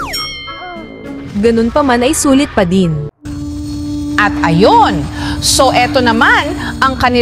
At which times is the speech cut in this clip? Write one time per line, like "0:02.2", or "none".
0:03.1